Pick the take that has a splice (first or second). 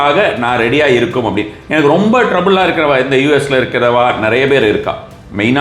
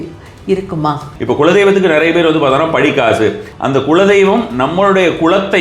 second